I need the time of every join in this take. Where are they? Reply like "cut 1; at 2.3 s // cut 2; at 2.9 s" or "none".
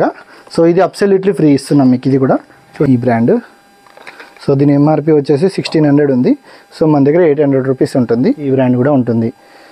cut 1; at 2.9 s // cut 2; at 8.5 s

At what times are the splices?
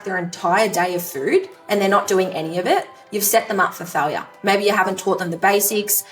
cut 1; at 4.3 s

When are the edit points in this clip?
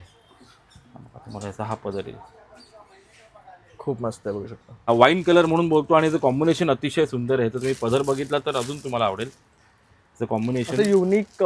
cut 1; at 4.7 s

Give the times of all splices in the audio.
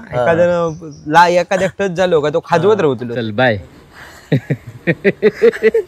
cut 1; at 3.1 s

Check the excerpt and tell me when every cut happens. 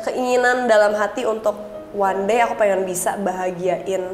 none

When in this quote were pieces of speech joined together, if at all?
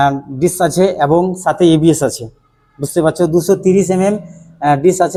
none

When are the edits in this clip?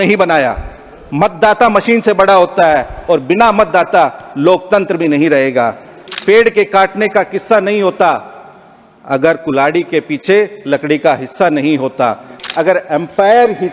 cut 1; at 6.1 s // cut 2; at 12.4 s

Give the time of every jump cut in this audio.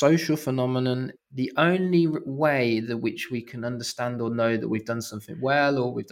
cut 1; at 1.2 s

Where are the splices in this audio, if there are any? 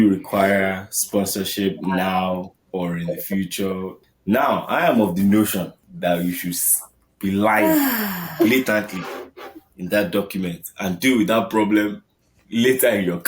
cut 1; at 4.0 s // cut 2; at 5.8 s

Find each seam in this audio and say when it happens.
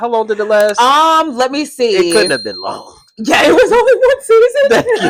none

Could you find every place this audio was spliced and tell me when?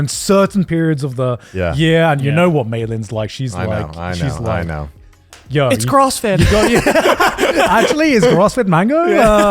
none

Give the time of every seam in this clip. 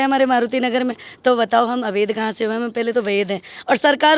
none

